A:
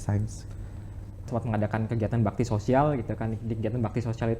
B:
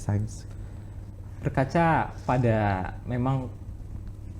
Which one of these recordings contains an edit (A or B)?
A